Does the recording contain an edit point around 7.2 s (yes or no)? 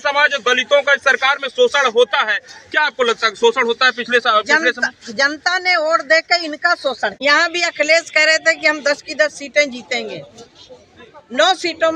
yes